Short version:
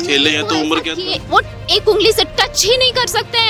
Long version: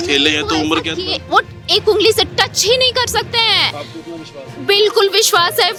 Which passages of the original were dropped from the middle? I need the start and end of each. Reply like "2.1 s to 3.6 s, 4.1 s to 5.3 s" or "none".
none